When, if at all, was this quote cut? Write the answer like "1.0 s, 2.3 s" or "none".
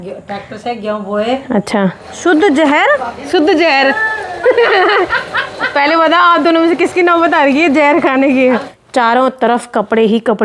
2.1 s, 3.3 s, 8.7 s